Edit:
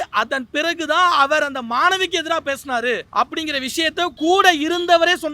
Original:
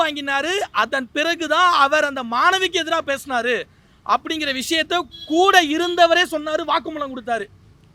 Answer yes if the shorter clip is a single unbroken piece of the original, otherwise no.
no